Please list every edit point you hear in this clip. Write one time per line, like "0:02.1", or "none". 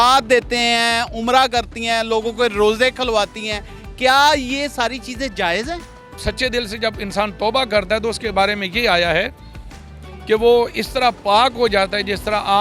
0:06.1